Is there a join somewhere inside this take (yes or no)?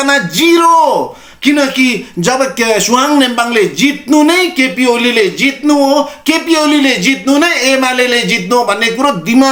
no